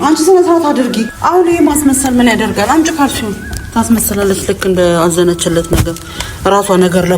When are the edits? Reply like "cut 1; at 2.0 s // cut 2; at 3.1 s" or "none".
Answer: cut 1; at 1.1 s

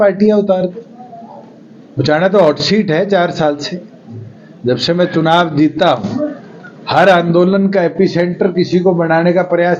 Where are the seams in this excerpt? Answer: none

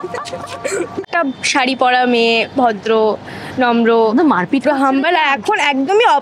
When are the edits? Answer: cut 1; at 1.1 s

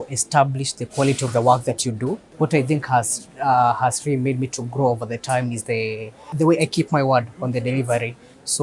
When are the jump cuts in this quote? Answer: cut 1; at 2.2 s // cut 2; at 6.2 s

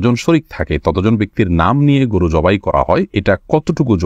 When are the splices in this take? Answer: cut 1; at 3.1 s

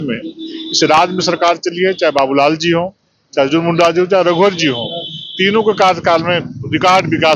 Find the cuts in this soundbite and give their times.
none

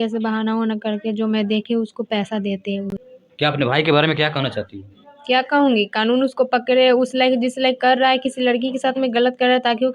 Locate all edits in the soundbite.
cut 1; at 2.9 s

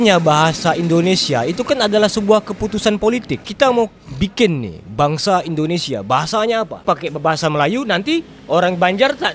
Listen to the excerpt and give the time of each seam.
cut 1; at 3.4 s // cut 2; at 6.7 s

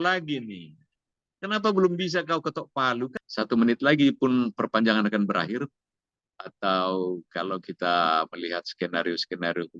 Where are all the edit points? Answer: cut 1; at 3.2 s

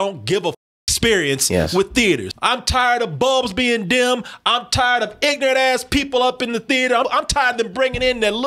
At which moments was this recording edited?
cut 1; at 2.3 s // cut 2; at 7.1 s

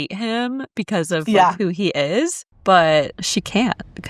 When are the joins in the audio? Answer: cut 1; at 2.5 s // cut 2; at 3.2 s

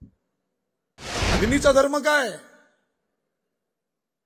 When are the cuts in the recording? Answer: cut 1; at 1.2 s

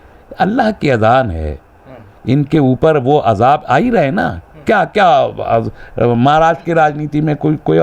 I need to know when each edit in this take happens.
none

